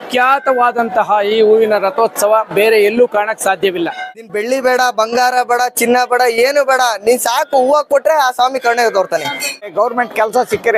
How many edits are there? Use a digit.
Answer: 2